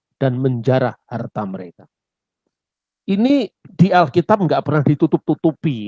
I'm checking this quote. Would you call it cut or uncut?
uncut